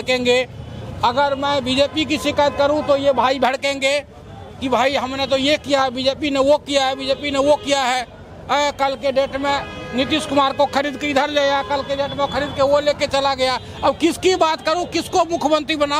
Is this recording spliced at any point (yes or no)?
no